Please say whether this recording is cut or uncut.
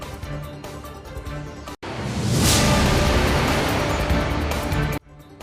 uncut